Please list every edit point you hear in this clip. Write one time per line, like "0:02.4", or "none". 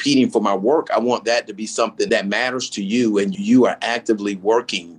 0:02.1
0:03.3